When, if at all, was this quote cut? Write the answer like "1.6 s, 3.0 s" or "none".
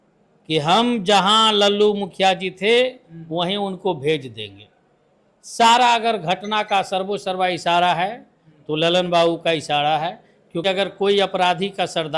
10.7 s